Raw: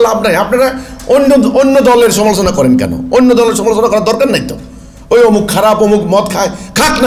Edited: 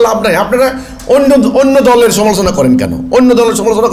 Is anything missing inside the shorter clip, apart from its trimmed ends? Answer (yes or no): no